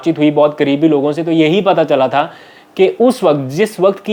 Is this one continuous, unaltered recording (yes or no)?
yes